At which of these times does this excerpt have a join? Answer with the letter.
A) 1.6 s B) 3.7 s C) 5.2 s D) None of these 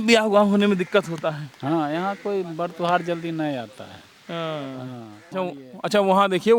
C